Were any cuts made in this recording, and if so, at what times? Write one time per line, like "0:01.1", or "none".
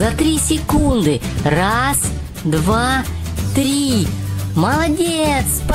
none